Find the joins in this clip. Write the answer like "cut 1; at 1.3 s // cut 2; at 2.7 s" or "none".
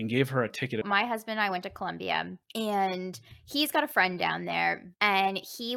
cut 1; at 0.9 s // cut 2; at 4.9 s